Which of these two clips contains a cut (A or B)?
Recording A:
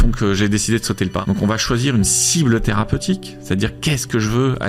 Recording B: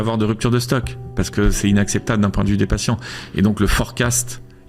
A